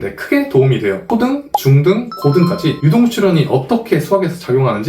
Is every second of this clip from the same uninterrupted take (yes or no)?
no